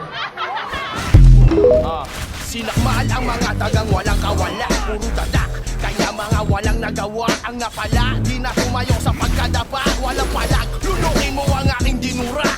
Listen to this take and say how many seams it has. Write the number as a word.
one